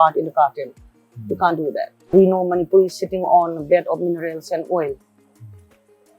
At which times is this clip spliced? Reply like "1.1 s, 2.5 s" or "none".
2.1 s